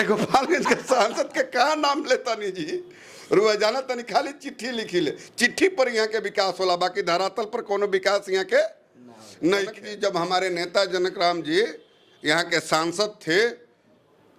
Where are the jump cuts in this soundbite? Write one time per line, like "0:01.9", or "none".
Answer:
0:09.9